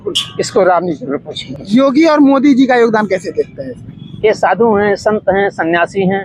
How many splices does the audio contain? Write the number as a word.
zero